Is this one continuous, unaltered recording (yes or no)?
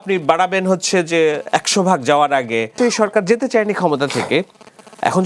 no